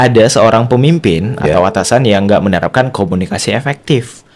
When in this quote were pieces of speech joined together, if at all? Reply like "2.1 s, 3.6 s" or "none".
none